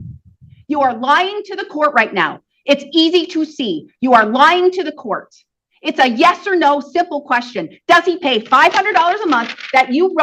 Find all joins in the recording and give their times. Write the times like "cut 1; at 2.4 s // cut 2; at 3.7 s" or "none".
none